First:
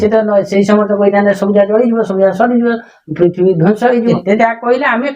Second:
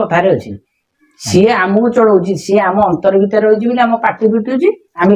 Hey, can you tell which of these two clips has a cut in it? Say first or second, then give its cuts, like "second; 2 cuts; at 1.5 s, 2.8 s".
first; 1 cut; at 4.2 s